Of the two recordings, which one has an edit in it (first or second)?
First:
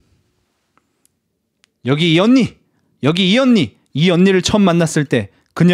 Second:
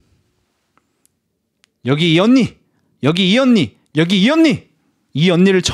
first